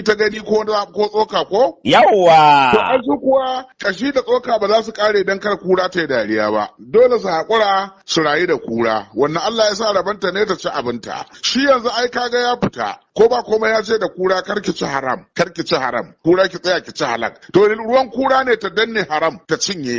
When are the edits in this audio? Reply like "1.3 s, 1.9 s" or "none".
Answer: none

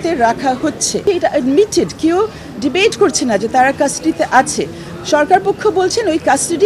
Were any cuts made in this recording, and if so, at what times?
1.0 s

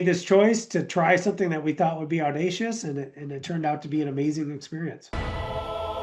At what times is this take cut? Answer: 5.1 s

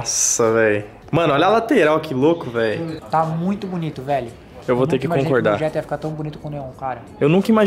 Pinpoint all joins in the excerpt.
0.9 s, 2.9 s

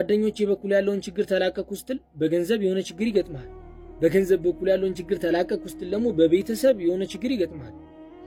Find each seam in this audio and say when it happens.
none

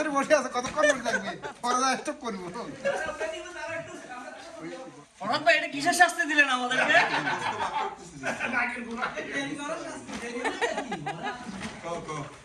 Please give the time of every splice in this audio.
none

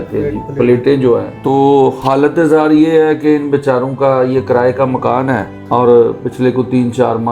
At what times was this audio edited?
1.3 s, 5.5 s

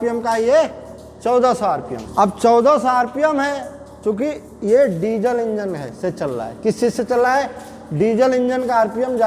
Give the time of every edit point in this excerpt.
2.0 s

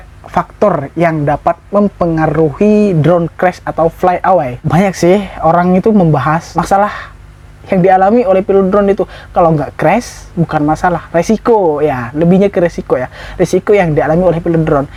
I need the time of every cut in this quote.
none

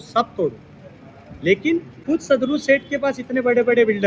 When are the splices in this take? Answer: 2.0 s

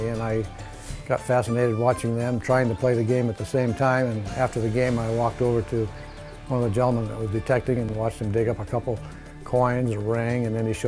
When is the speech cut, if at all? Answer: 7.9 s

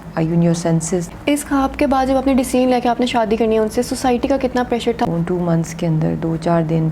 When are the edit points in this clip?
1.1 s, 5.1 s

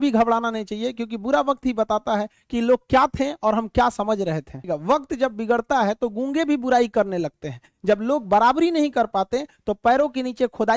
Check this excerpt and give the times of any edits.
4.7 s

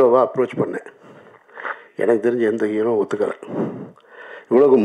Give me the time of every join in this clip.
none

